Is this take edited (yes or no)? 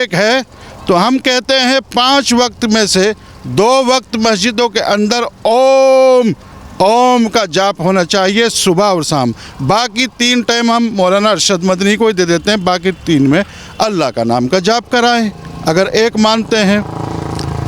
no